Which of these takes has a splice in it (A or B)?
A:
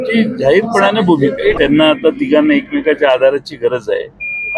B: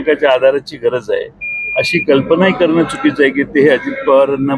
A